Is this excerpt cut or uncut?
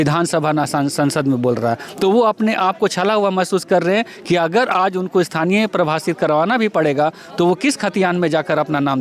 uncut